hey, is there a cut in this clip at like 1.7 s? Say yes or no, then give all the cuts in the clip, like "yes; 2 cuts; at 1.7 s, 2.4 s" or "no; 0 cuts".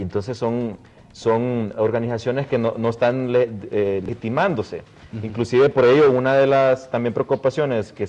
yes; 1 cut; at 1.7 s